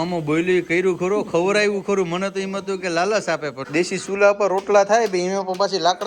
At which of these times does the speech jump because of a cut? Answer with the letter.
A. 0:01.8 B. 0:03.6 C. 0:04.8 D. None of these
B